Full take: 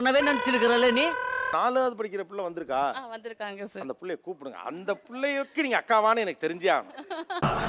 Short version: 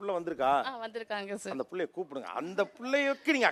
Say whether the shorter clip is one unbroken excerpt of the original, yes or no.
yes